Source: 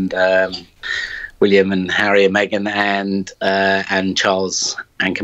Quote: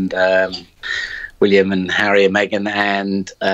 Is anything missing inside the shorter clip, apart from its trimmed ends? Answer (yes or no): no